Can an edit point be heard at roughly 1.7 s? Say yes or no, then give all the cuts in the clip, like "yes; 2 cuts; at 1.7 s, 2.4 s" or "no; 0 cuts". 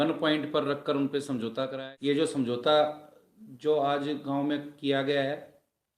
yes; 1 cut; at 1.7 s